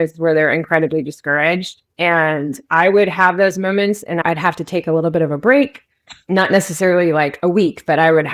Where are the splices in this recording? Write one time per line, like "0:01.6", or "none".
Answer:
0:04.2